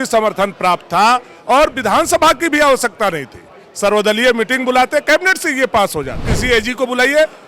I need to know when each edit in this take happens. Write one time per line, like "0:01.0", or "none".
0:06.3

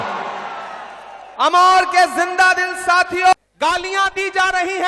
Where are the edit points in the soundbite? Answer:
0:03.3

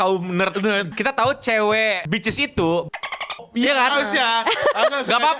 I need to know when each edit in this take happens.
0:00.9
0:02.0

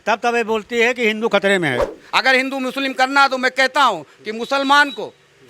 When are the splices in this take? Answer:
0:01.9

